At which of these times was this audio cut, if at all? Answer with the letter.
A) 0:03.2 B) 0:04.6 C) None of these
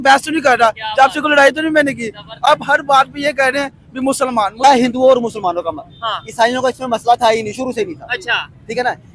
B